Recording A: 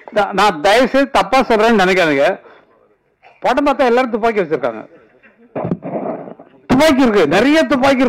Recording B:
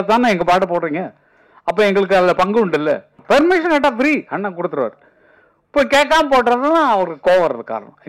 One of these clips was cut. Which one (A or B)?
B